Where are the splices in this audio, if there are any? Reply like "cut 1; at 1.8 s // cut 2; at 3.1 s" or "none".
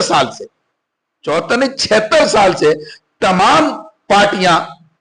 none